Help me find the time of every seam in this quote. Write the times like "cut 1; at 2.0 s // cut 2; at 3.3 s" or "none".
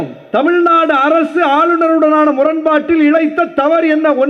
none